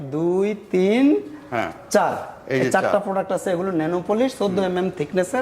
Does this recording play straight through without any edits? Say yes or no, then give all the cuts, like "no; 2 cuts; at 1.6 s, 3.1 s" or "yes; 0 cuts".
yes; 0 cuts